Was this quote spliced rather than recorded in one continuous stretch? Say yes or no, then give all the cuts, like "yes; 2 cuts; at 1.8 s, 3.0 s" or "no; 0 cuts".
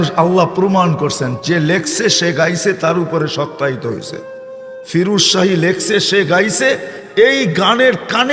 yes; 1 cut; at 6.5 s